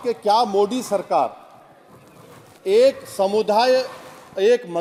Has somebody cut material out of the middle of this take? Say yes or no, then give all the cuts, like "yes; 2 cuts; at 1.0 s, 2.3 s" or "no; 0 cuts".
no; 0 cuts